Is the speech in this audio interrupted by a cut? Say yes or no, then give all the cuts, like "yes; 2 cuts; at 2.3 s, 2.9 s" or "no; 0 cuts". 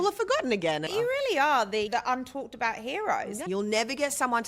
yes; 3 cuts; at 0.9 s, 1.9 s, 3.4 s